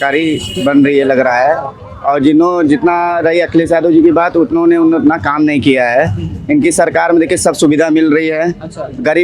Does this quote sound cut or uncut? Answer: uncut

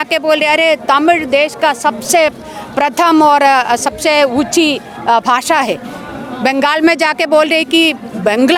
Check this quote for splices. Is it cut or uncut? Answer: uncut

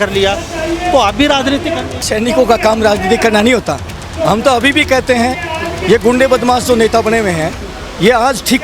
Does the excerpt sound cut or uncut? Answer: cut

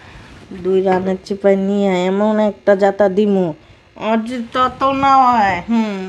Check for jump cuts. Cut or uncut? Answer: uncut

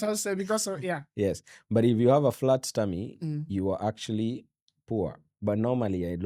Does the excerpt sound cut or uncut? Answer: uncut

